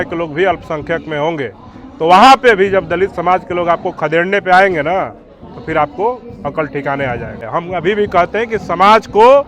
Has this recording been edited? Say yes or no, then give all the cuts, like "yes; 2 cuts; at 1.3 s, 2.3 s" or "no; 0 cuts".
yes; 1 cut; at 7.5 s